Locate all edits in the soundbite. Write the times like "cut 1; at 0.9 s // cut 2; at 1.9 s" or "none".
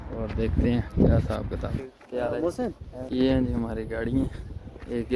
none